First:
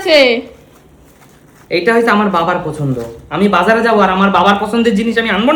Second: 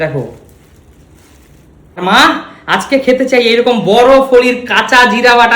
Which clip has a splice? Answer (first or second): second